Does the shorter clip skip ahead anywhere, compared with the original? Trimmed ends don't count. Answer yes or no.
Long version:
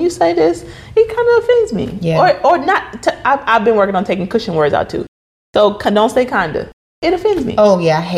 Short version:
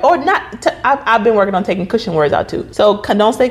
yes